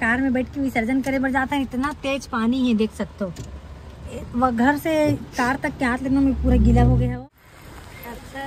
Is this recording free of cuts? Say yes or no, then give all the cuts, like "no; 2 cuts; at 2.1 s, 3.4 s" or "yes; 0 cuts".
no; 1 cut; at 7.1 s